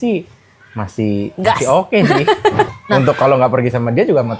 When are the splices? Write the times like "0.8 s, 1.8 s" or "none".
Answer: 2.7 s

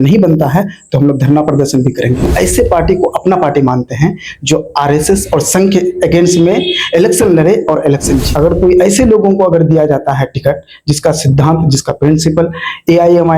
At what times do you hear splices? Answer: 2.2 s, 8.3 s

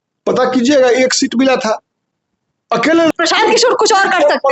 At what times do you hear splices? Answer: 3.1 s

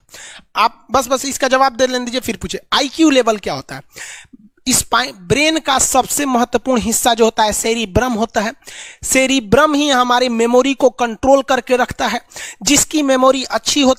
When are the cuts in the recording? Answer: none

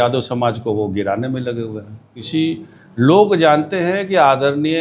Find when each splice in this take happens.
2.2 s

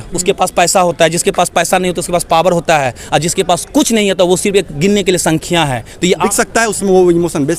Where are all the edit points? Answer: 6.2 s

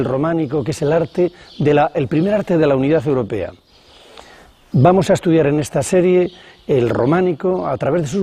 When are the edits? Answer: 3.3 s

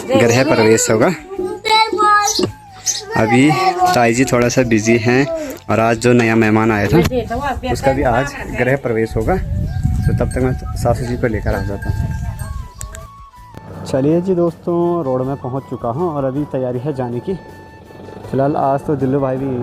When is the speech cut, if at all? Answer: none

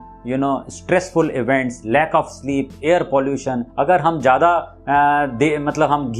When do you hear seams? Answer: 3.7 s

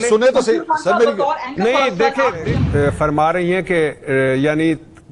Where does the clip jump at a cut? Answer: 2.5 s

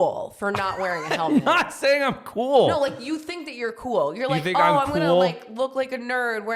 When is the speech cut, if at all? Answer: none

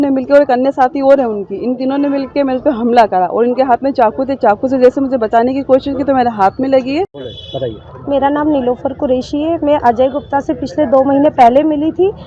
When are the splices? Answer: 7.2 s

